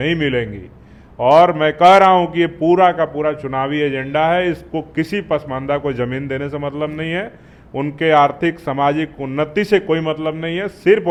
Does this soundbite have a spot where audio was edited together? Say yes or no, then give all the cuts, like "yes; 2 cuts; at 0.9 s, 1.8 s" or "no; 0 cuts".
no; 0 cuts